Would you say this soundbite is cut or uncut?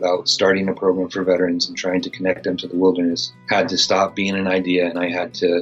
cut